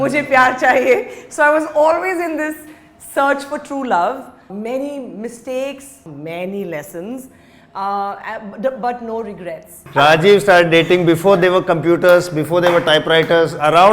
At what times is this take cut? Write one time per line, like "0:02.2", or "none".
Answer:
0:04.5
0:06.0
0:09.8